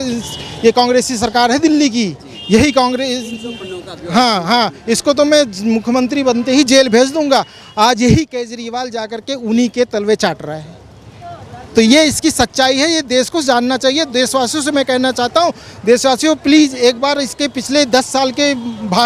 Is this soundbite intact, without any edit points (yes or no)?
yes